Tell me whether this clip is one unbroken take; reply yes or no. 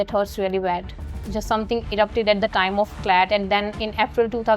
no